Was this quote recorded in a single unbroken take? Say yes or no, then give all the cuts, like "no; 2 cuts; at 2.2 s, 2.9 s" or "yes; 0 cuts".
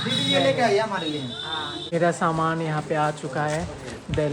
no; 1 cut; at 1.9 s